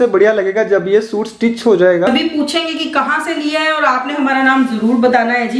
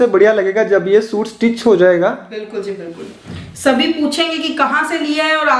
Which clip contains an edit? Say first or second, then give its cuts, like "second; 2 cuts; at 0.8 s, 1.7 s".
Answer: first; 1 cut; at 2.1 s